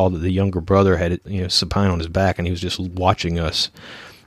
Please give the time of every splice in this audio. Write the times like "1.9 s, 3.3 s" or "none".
1.2 s